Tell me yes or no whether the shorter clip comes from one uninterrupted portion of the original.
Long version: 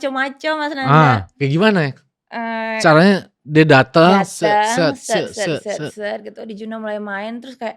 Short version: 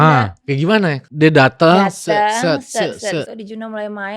no